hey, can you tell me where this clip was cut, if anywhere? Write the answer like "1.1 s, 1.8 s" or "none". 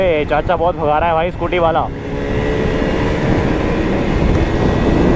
none

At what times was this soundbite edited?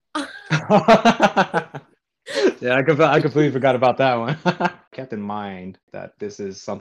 4.9 s, 5.8 s

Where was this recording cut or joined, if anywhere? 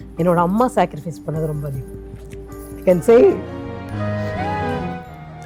none

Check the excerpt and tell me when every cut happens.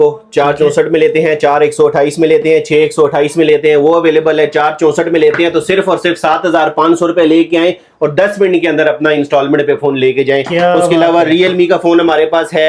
none

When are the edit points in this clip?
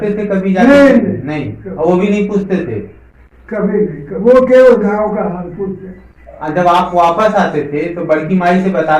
6.4 s

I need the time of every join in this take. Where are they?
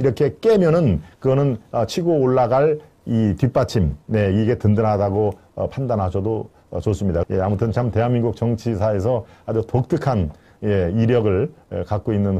7.2 s

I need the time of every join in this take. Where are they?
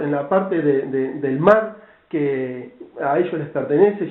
2.1 s

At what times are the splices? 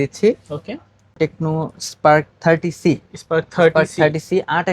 1.1 s

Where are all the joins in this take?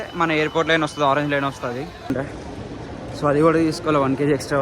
2.1 s

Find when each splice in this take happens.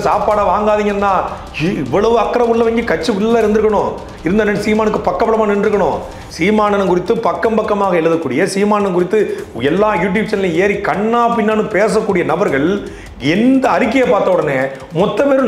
none

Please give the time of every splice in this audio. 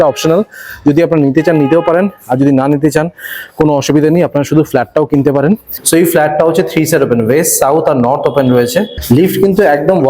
5.7 s, 8.9 s

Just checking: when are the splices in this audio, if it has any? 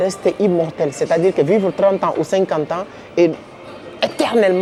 none

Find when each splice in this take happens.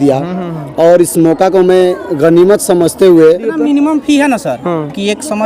3.5 s

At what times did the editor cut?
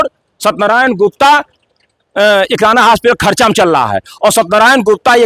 none

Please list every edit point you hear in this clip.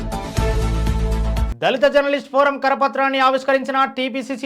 1.5 s

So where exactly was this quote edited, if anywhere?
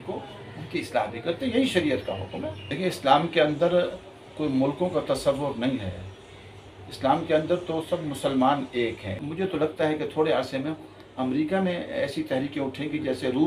2.7 s, 9.2 s

